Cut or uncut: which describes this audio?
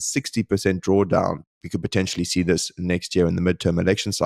uncut